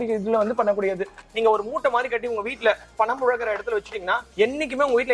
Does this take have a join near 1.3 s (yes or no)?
yes